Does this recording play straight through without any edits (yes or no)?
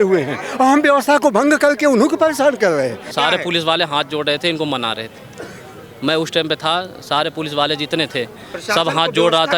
no